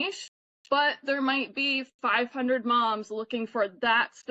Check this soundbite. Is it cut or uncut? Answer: uncut